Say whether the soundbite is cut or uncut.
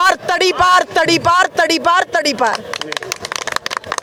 uncut